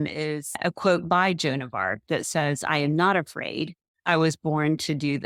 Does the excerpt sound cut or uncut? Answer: uncut